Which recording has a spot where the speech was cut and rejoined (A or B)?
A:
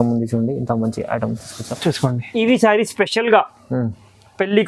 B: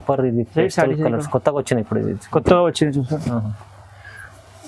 A